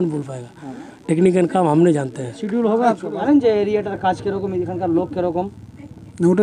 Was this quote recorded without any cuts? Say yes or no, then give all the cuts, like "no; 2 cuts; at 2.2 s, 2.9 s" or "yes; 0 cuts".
no; 1 cut; at 3.2 s